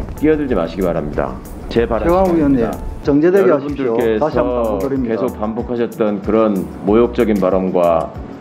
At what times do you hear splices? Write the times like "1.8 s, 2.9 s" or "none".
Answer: 3.0 s